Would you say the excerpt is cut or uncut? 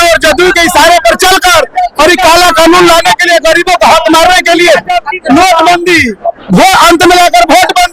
uncut